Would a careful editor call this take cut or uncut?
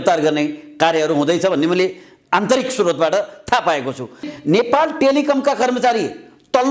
cut